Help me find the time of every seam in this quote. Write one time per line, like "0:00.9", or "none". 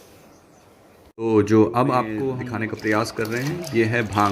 0:02.2